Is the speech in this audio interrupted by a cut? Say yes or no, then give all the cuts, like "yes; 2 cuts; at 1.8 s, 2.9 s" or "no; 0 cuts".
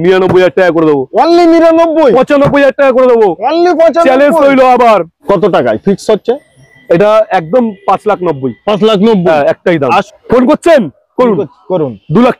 yes; 2 cuts; at 5.1 s, 10.1 s